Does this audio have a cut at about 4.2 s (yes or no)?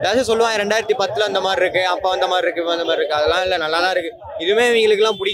no